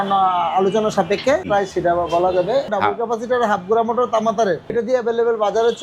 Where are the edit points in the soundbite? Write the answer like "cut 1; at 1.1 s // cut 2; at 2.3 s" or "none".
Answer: cut 1; at 1.5 s // cut 2; at 2.7 s // cut 3; at 4.7 s